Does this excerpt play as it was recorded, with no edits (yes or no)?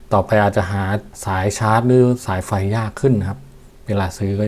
no